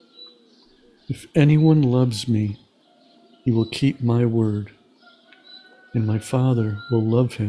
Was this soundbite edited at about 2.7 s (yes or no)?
no